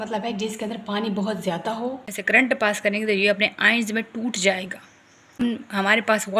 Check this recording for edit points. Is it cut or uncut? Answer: cut